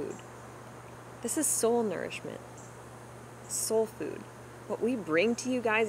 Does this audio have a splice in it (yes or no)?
no